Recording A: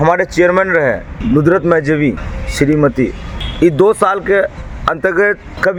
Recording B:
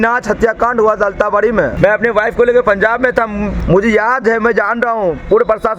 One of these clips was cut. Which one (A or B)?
B